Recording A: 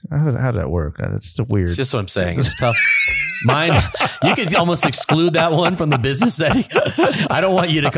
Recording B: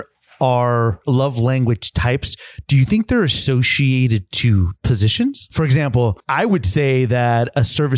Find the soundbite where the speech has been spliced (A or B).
B